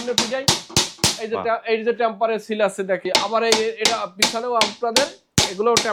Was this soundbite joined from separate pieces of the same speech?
yes; 1 cut; at 3.0 s

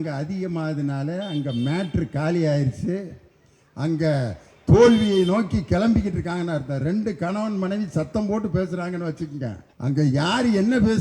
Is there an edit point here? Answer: yes; 1 cut; at 9.7 s

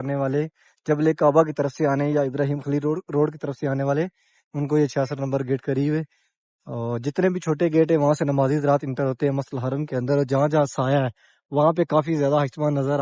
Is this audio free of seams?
yes; 0 cuts

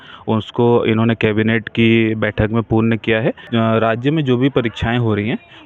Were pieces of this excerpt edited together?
yes; 1 cut; at 3.4 s

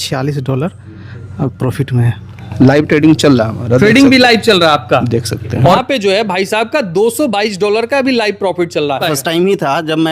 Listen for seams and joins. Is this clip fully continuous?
no; 3 cuts; at 2.5 s, 5.8 s, 9.0 s

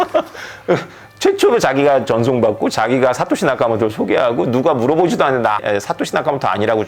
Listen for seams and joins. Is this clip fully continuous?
no; 1 cut; at 5.6 s

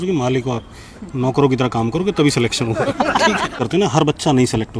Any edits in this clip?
yes; 1 cut; at 3.6 s

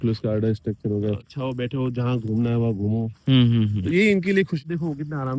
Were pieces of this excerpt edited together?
yes; 2 cuts; at 1.2 s, 4.6 s

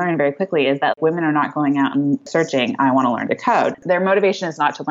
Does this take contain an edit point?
yes; 1 cut; at 0.9 s

